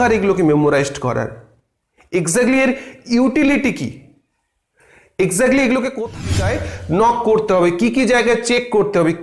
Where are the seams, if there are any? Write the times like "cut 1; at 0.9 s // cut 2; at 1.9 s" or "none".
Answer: cut 1; at 6.2 s